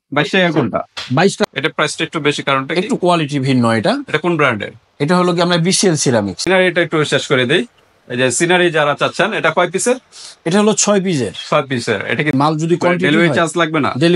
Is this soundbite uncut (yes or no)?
no